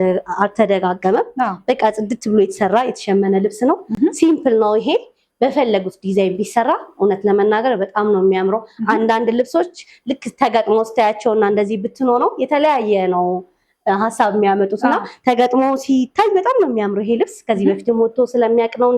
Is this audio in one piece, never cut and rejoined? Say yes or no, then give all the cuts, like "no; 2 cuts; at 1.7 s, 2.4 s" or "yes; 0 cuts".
yes; 0 cuts